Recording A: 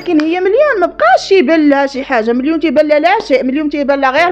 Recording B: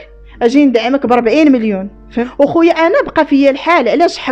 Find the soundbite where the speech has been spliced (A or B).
B